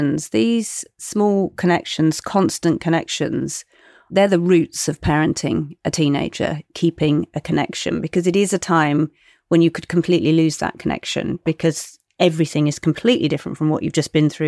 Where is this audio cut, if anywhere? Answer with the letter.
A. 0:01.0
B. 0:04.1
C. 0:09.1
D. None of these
B